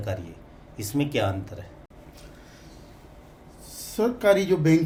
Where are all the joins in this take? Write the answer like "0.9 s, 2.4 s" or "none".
none